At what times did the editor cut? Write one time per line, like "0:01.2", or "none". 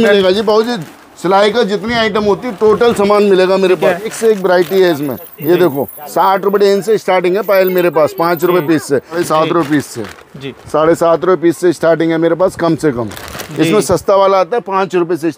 0:04.1
0:09.2
0:13.5